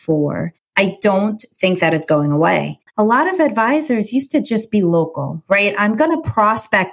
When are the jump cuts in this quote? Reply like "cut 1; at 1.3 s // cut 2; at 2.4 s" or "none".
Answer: cut 1; at 2.9 s